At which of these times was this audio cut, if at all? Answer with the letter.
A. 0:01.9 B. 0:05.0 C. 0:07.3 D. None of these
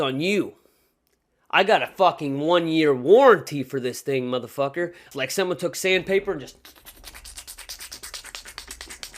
B